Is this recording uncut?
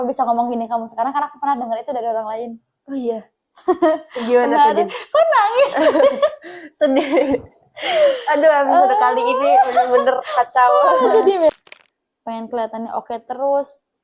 no; 1 cut; at 11.5 s

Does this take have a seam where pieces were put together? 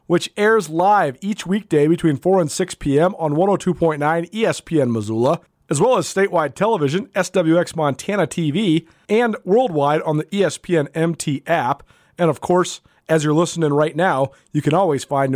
yes; 2 cuts; at 5.6 s, 8.9 s

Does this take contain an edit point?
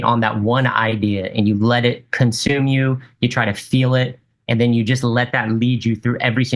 no; 0 cuts

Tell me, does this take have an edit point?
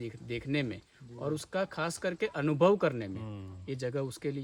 no; 0 cuts

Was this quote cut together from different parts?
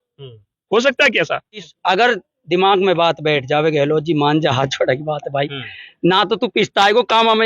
yes; 1 cut; at 1.6 s

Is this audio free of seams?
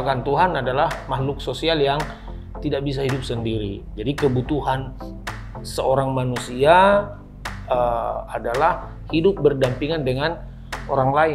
yes; 0 cuts

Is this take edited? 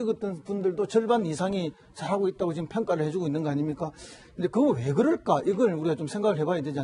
yes; 1 cut; at 1.9 s

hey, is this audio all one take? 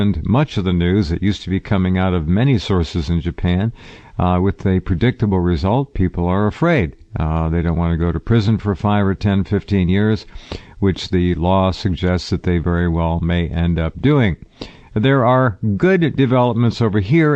yes; 0 cuts

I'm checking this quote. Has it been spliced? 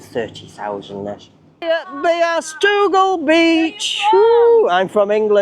yes; 1 cut; at 1.6 s

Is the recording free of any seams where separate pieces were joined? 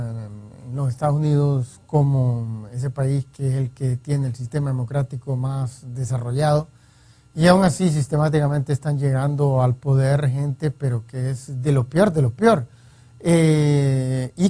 yes; 0 cuts

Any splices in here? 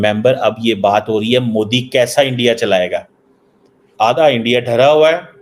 yes; 1 cut; at 2.3 s

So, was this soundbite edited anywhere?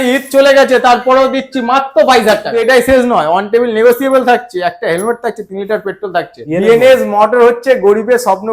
yes; 2 cuts; at 2.5 s, 6.4 s

